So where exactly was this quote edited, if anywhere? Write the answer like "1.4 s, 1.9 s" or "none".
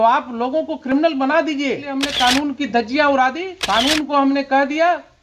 2.0 s, 3.5 s